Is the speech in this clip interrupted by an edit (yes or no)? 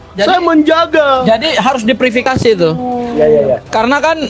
no